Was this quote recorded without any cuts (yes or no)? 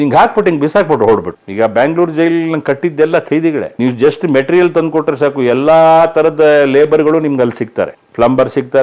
no